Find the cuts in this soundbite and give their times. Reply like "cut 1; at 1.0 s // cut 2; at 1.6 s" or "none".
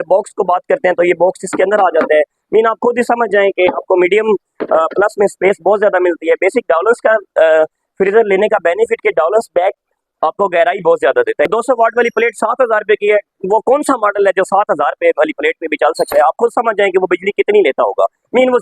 cut 1; at 11.5 s